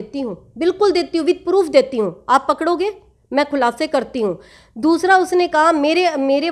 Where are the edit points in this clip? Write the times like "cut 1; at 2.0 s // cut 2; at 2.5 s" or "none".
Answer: none